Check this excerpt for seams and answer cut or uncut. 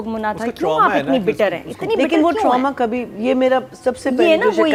uncut